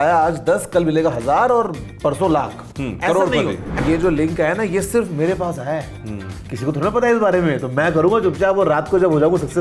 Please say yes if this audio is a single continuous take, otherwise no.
no